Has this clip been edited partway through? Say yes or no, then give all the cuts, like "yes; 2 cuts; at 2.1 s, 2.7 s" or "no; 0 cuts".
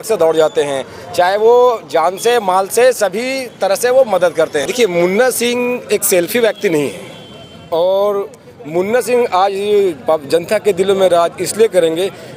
no; 0 cuts